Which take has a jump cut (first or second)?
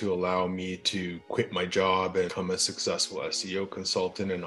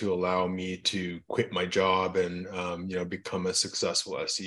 first